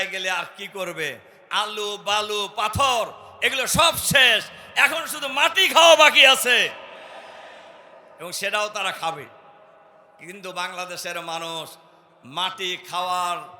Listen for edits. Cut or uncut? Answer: uncut